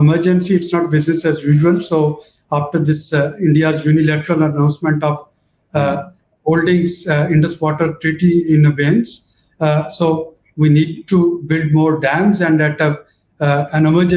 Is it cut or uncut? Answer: uncut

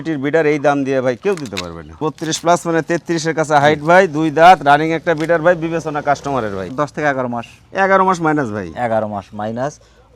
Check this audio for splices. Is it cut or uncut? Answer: cut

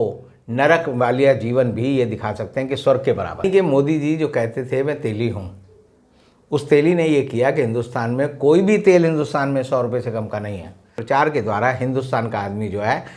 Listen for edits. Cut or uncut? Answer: cut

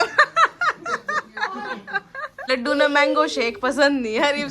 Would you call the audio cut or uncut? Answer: cut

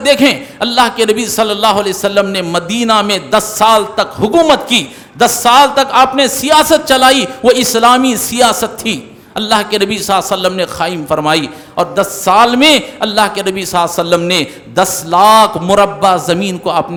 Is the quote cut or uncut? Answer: uncut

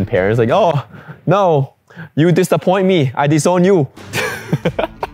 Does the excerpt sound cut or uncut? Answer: uncut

